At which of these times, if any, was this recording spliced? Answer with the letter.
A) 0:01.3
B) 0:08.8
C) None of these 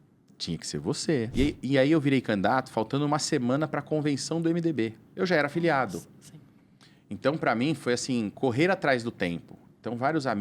A